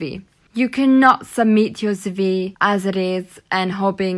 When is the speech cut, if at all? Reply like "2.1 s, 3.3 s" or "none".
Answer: 2.5 s